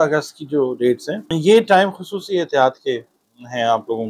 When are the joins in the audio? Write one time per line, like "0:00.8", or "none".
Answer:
none